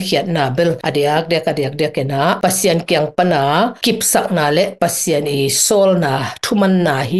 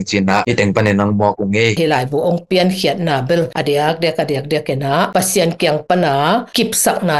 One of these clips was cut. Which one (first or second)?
second